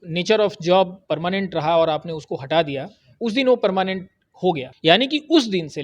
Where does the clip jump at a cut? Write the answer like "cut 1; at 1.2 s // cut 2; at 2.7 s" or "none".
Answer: cut 1; at 4.7 s